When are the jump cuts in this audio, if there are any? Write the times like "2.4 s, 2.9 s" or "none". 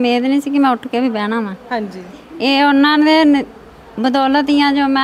none